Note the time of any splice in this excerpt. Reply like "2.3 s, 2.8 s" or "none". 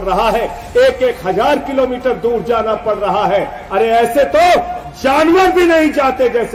none